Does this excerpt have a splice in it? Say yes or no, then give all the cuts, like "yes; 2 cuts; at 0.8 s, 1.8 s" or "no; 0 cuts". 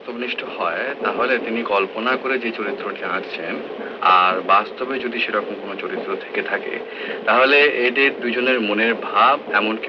no; 0 cuts